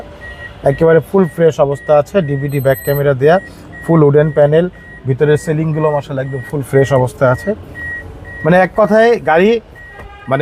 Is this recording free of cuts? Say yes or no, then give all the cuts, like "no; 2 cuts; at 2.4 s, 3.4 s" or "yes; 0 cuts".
yes; 0 cuts